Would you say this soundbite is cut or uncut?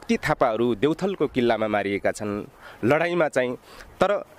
uncut